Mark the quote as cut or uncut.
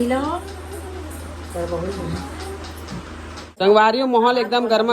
cut